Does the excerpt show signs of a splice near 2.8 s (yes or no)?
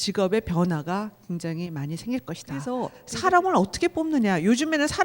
yes